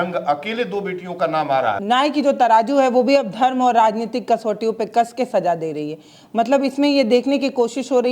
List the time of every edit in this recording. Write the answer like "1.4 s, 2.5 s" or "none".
1.8 s